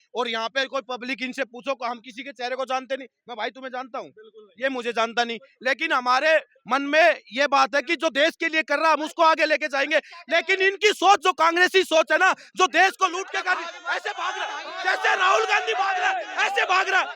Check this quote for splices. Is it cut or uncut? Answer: uncut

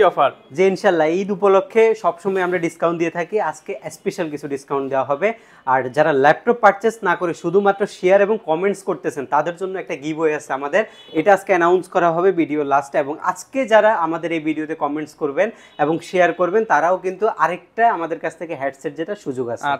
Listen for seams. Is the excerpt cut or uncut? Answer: uncut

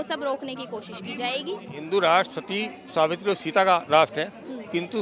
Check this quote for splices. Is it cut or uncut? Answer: cut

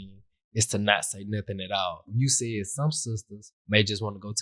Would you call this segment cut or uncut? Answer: cut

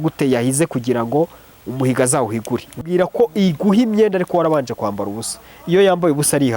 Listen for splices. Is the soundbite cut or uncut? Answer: cut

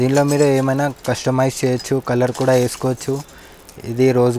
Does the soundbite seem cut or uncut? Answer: uncut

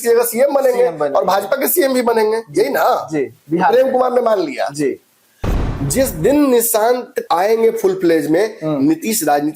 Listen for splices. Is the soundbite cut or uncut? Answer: cut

